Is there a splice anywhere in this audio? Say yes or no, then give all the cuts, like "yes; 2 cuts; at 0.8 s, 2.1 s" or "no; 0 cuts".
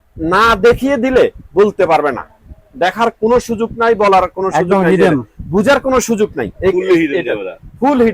no; 0 cuts